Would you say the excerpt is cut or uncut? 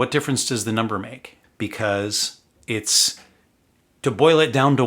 cut